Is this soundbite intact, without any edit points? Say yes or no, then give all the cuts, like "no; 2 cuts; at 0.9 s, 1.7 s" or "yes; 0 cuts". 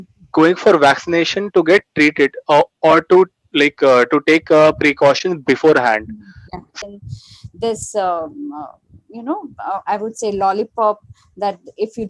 no; 1 cut; at 6.8 s